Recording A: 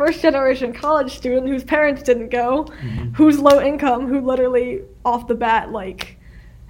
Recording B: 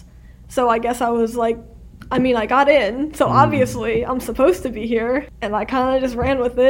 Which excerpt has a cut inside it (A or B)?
B